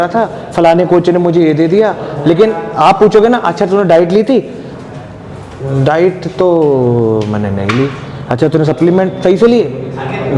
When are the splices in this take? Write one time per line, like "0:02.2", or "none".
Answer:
none